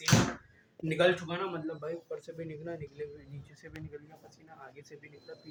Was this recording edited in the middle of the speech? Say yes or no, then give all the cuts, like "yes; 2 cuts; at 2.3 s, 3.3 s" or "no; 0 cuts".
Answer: no; 0 cuts